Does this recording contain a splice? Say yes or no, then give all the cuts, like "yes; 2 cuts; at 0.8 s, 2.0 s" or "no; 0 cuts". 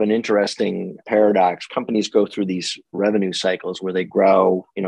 yes; 2 cuts; at 0.9 s, 1.6 s